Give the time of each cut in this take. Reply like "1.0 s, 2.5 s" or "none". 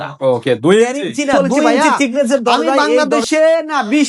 3.0 s